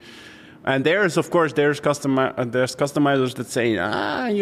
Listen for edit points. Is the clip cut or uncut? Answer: uncut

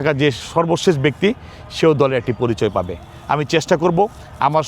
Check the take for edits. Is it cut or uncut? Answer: uncut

